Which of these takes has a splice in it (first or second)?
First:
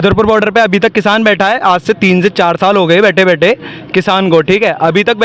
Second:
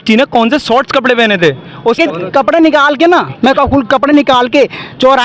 second